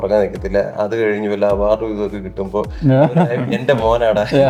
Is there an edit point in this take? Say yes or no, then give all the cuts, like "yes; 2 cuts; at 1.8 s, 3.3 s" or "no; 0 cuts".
no; 0 cuts